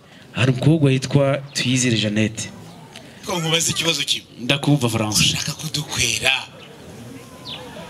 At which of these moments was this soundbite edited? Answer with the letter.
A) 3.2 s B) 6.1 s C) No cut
A